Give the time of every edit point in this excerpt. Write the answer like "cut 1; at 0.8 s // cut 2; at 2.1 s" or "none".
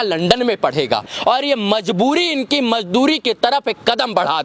cut 1; at 1.1 s